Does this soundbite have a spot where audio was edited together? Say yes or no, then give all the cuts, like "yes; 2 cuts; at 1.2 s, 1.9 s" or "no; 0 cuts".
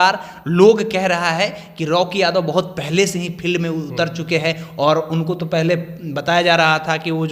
no; 0 cuts